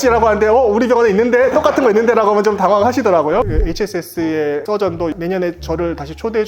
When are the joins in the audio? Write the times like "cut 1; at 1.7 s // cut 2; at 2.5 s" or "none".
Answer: cut 1; at 3.5 s